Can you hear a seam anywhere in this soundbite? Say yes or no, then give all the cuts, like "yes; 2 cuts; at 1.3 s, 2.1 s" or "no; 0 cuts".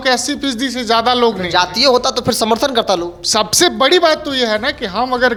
no; 0 cuts